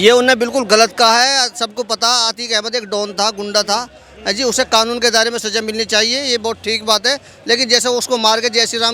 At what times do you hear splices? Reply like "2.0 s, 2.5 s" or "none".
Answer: none